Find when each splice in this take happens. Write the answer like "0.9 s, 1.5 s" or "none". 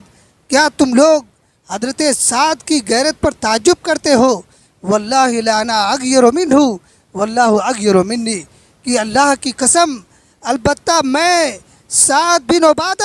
none